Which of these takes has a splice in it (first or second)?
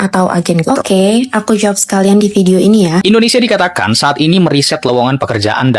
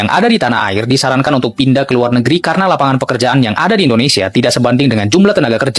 first